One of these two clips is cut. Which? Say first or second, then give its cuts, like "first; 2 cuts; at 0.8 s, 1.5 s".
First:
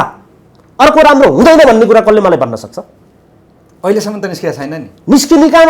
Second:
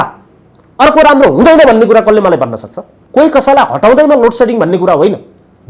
second; 1 cut; at 2.9 s